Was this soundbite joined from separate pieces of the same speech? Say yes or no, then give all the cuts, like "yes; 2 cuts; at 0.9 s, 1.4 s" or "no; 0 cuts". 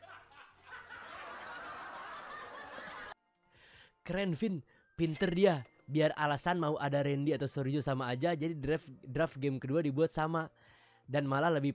yes; 1 cut; at 3.1 s